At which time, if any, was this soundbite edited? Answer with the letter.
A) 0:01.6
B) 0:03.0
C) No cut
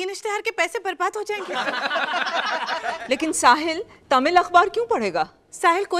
B